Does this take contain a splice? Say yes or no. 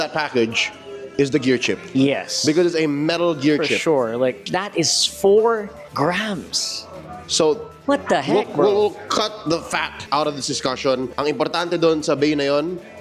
yes